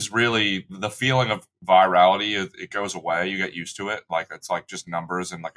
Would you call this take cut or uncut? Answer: uncut